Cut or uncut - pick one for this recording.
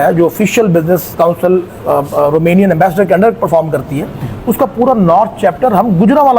uncut